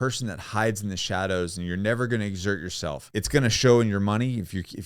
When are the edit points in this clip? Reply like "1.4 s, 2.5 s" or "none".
3.0 s